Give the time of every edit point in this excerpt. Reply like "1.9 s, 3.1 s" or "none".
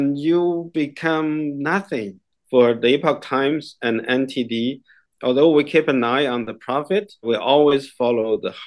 2.3 s, 5.0 s, 7.3 s